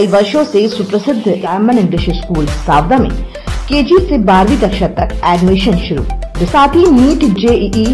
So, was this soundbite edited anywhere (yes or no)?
yes